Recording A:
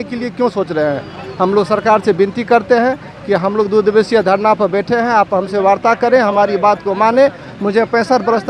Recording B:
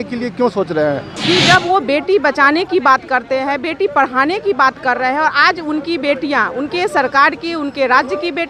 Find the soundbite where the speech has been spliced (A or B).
B